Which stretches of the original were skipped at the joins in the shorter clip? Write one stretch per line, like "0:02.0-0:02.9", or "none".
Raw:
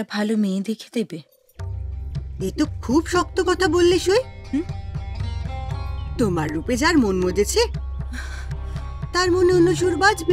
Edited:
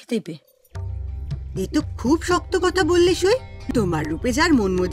0:04.4-0:06.0